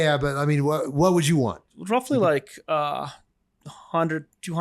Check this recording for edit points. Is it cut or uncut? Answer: cut